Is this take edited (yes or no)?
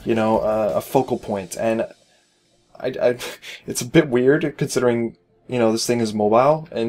yes